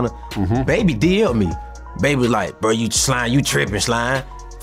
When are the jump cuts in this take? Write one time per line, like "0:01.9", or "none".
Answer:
none